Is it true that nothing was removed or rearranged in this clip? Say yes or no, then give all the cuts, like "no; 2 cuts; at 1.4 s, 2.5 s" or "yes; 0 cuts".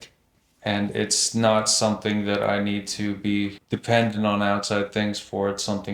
no; 1 cut; at 3.7 s